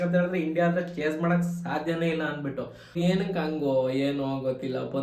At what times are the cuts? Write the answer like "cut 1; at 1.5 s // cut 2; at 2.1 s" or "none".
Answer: cut 1; at 3.0 s

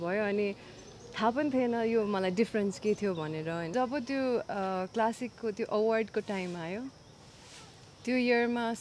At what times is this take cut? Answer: cut 1; at 3.7 s

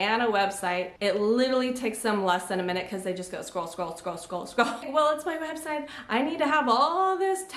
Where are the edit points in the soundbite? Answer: cut 1; at 0.9 s // cut 2; at 4.9 s

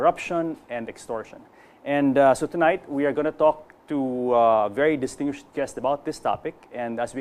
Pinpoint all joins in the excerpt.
cut 1; at 5.5 s

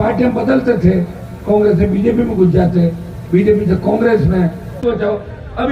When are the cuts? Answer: cut 1; at 4.8 s

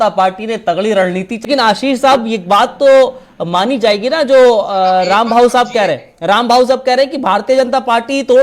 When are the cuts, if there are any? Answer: cut 1; at 1.5 s

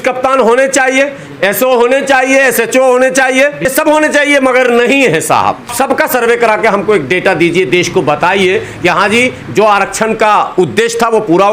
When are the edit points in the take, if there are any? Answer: cut 1; at 5.7 s

